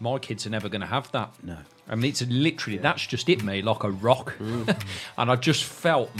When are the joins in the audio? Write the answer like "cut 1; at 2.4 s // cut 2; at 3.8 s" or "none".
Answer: none